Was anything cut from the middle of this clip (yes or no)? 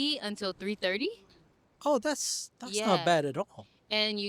no